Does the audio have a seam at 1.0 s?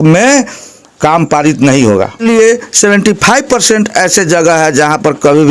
no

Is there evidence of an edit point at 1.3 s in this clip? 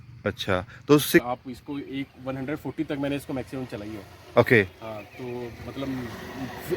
yes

